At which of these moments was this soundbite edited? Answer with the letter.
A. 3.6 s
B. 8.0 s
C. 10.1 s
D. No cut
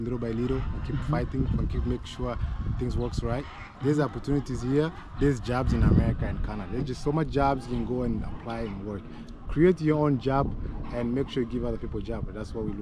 D